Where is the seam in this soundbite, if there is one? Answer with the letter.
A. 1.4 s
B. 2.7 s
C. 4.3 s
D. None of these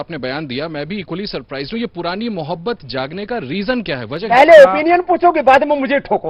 C